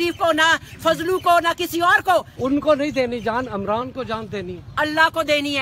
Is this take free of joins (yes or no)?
no